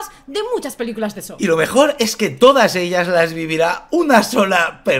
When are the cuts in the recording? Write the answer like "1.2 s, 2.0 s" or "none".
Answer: none